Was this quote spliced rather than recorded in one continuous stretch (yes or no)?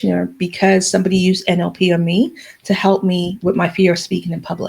no